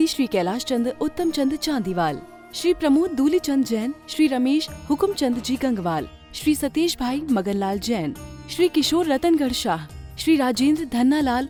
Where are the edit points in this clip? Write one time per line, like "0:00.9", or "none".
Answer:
none